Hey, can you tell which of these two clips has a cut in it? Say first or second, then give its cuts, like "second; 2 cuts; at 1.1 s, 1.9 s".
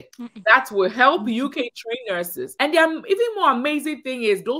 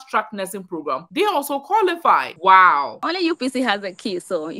second; 1 cut; at 3.0 s